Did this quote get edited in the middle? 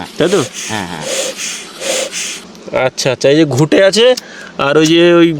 yes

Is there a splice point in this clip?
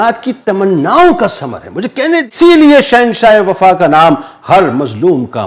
yes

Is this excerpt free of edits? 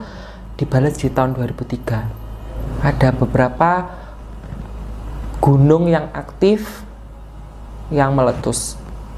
no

